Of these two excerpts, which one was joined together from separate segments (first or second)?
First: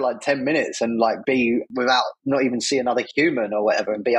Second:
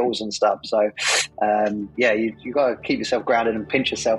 first